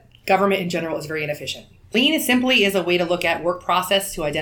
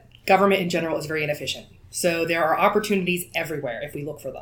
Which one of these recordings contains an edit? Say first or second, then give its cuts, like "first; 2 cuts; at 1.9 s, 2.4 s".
first; 1 cut; at 1.9 s